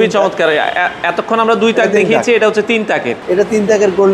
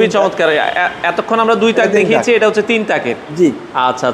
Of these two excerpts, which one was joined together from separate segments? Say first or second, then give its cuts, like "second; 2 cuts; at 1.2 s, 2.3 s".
first; 1 cut; at 3.1 s